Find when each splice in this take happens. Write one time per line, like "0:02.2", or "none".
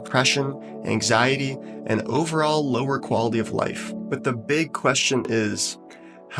0:03.9